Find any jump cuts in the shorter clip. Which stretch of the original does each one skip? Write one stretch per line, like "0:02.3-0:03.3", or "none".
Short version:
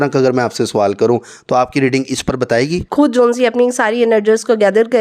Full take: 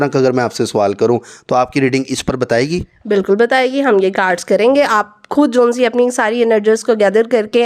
0:02.8-0:05.2